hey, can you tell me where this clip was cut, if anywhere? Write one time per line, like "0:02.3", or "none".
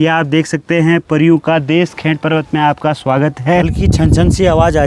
0:03.7